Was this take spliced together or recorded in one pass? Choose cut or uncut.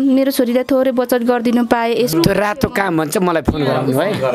uncut